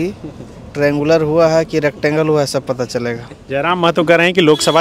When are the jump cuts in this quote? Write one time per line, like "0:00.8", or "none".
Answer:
none